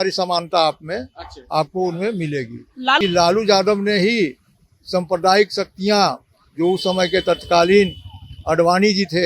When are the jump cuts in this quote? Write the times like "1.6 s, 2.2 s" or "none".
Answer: 3.0 s

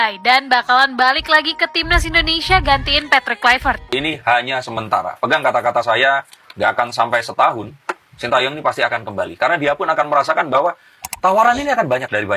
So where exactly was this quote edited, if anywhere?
3.8 s

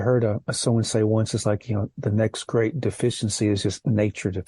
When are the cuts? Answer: none

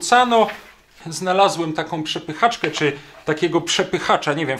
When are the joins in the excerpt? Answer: 1.0 s

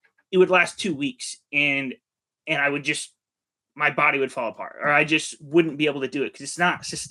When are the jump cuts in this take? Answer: none

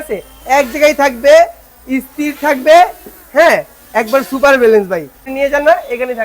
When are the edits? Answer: 5.2 s

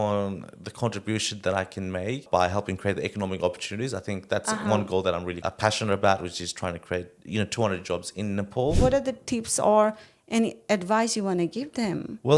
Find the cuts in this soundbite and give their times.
2.3 s, 5.4 s, 8.8 s

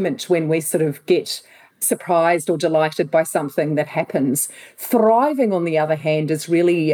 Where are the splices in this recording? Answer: 1.8 s

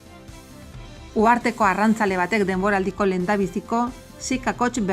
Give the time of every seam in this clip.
1.1 s

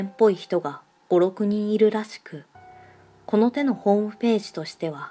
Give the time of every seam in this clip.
none

